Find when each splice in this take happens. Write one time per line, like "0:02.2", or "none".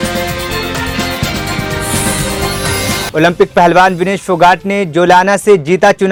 none